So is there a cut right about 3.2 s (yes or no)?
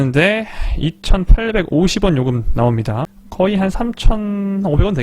yes